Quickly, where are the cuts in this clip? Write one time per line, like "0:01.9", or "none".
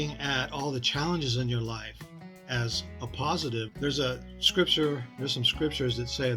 0:03.7